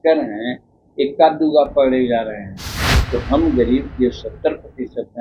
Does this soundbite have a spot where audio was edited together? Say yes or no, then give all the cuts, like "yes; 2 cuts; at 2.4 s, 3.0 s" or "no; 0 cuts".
yes; 1 cut; at 2.9 s